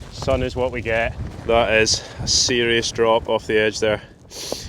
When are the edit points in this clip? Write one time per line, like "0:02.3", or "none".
0:01.3